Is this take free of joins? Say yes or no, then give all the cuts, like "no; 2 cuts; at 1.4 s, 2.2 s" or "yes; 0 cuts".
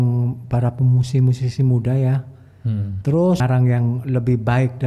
no; 1 cut; at 3.4 s